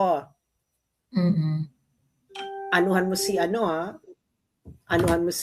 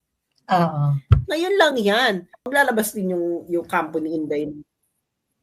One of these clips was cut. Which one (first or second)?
second